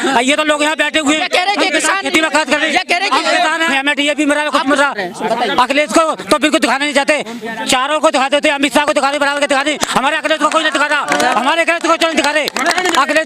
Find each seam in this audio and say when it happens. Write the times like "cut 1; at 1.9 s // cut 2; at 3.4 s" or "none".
cut 1; at 3.7 s